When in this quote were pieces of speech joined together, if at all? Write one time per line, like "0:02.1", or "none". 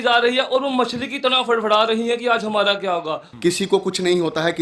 0:03.2